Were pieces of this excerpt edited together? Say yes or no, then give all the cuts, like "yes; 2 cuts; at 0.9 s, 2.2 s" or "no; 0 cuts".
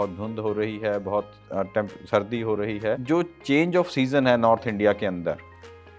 yes; 1 cut; at 3.0 s